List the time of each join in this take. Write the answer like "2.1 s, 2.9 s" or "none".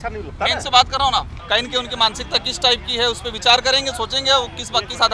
1.3 s

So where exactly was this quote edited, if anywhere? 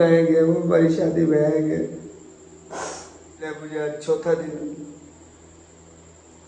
3.4 s

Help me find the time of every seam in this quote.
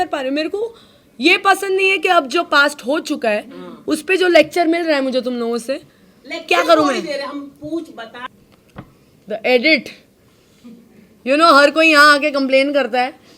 8.3 s

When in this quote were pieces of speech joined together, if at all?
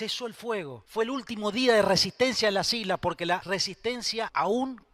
none

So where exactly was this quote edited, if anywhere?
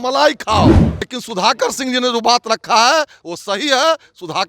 0.9 s

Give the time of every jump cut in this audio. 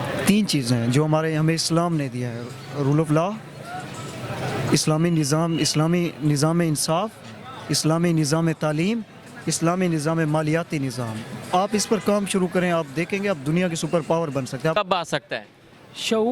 14.7 s

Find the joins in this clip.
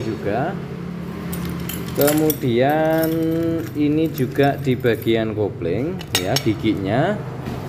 none

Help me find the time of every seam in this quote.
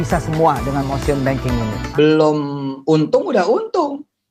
1.8 s

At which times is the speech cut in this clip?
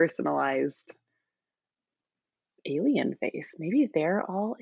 none

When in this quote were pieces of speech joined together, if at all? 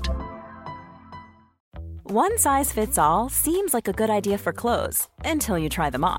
1.6 s

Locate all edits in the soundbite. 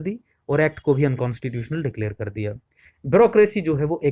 2.9 s

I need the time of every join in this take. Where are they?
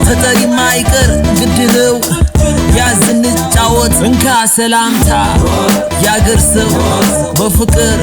none

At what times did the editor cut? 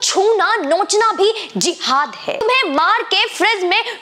2.4 s

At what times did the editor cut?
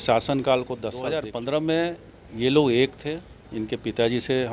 1.1 s

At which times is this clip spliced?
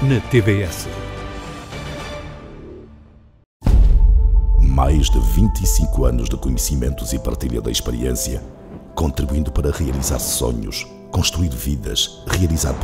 3.4 s

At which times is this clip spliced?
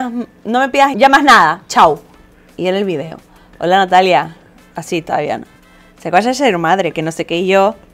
0.9 s

